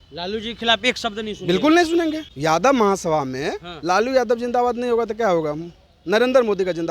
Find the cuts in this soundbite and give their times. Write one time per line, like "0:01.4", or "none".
0:02.3